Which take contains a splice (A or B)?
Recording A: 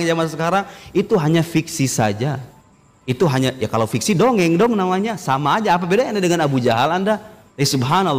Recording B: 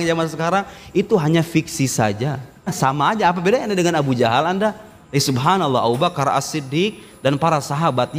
B